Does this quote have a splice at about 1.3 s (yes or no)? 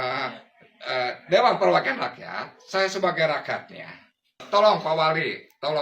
no